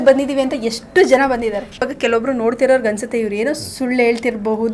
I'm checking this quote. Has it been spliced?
yes; 1 cut; at 1.9 s

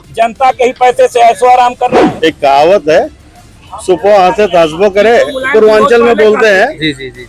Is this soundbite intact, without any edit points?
no; 1 cut; at 2.0 s

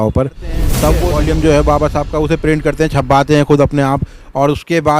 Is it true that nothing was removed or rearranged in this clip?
no; 1 cut; at 1.0 s

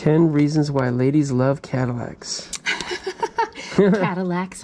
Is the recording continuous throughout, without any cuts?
yes; 0 cuts

